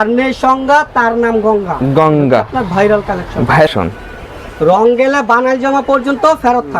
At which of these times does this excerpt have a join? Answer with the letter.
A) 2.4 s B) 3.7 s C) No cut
B